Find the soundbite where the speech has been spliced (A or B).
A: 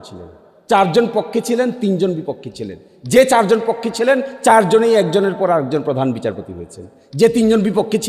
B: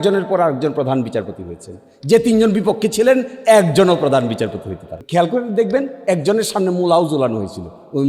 B